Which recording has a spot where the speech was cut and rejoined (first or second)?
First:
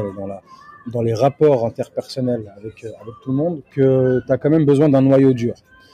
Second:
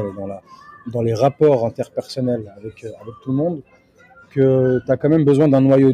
first